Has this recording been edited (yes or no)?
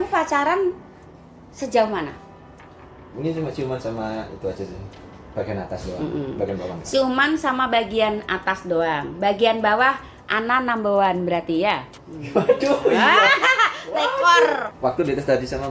yes